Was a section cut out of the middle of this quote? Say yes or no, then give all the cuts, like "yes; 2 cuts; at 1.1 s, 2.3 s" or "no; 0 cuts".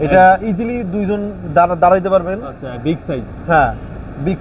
no; 0 cuts